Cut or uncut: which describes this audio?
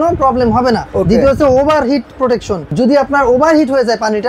cut